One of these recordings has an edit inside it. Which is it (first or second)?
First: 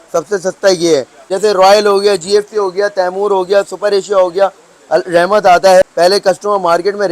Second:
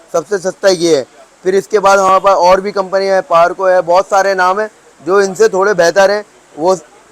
first